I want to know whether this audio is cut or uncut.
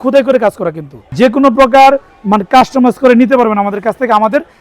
cut